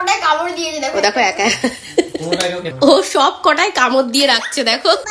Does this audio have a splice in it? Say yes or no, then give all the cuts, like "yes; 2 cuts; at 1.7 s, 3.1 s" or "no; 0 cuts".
yes; 1 cut; at 2.7 s